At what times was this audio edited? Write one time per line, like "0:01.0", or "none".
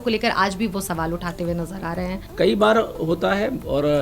0:02.2